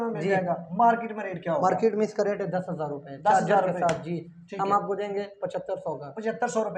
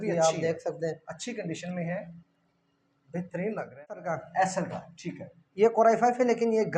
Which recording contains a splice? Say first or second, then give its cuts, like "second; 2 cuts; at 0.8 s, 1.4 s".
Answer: second; 1 cut; at 4.0 s